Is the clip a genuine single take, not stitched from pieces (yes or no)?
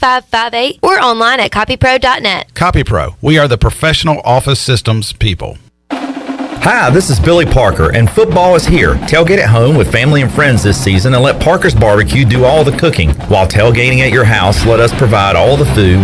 yes